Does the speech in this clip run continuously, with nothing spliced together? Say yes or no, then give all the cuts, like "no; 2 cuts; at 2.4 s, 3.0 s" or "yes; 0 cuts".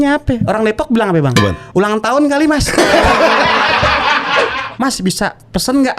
no; 1 cut; at 4.5 s